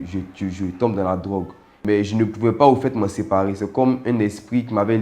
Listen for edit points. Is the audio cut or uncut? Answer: cut